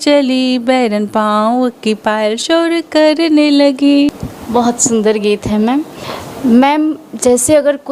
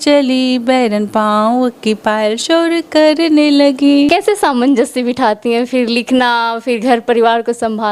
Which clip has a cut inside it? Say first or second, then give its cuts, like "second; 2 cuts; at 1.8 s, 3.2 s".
second; 1 cut; at 4.1 s